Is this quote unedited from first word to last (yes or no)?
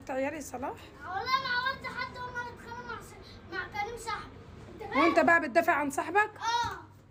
yes